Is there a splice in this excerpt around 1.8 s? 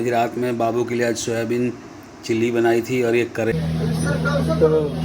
no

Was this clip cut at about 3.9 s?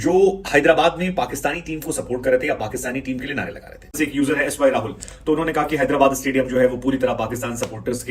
yes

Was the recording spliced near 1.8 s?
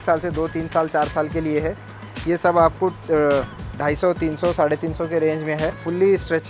no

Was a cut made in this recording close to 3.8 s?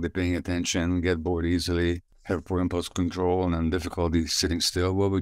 no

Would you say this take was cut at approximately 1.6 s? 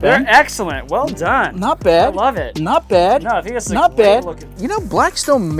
no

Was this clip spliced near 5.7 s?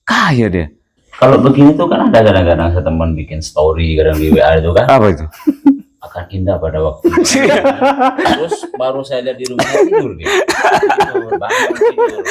no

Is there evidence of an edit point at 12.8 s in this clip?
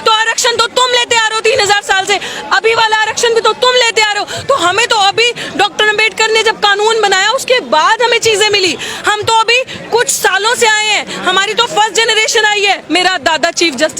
yes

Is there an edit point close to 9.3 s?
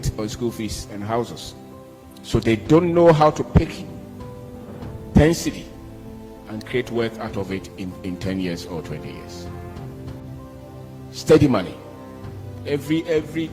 yes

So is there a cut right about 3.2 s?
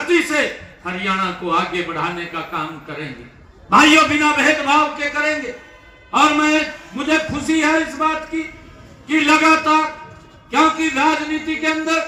no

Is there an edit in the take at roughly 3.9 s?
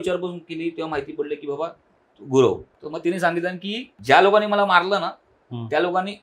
yes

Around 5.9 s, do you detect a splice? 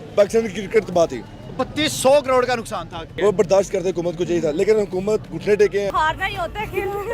yes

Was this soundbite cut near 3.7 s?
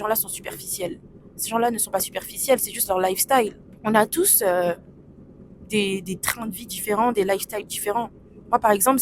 yes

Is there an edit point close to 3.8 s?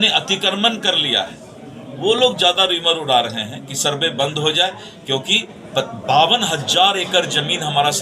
no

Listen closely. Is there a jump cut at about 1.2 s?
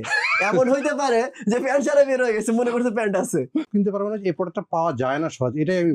no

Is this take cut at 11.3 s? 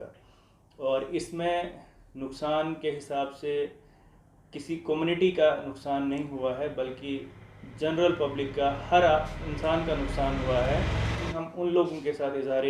yes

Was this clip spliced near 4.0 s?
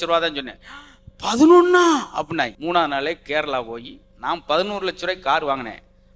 no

